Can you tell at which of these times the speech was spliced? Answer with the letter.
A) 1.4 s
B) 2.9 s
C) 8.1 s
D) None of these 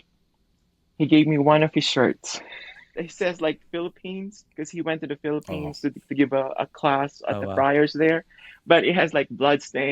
B